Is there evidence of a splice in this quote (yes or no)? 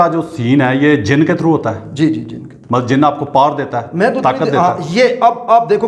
no